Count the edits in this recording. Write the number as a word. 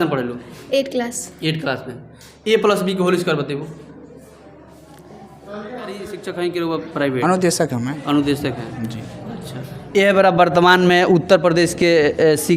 one